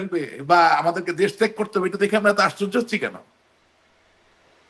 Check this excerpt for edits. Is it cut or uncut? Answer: uncut